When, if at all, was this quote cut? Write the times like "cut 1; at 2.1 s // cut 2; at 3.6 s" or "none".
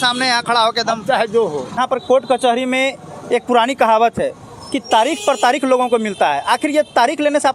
cut 1; at 1.8 s